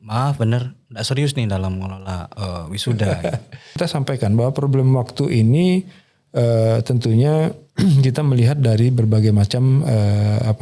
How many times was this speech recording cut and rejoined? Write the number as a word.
one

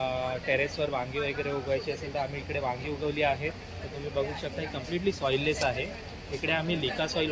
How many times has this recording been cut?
zero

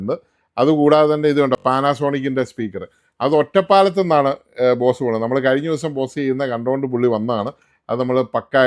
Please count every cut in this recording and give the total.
zero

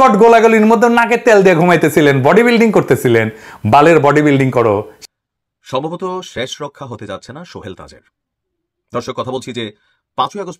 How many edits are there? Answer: one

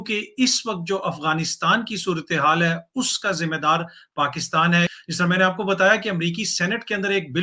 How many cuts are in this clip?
zero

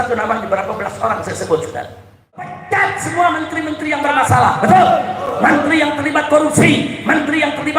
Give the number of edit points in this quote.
one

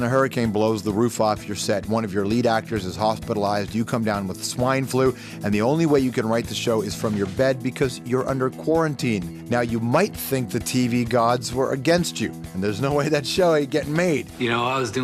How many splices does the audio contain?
zero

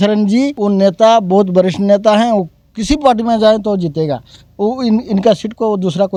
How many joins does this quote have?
zero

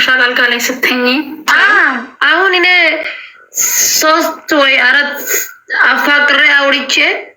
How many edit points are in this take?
one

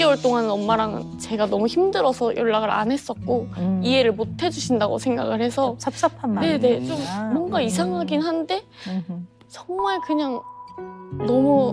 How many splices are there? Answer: zero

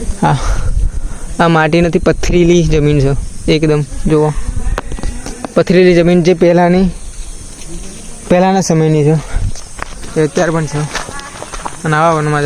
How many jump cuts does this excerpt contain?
zero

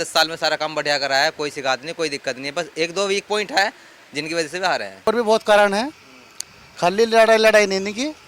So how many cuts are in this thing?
one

